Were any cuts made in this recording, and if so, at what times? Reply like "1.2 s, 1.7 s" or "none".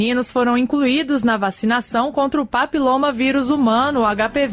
none